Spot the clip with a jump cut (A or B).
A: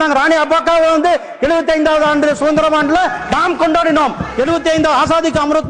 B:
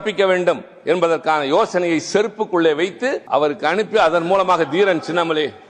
B